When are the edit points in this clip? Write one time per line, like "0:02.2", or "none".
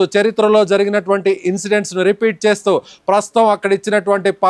0:03.2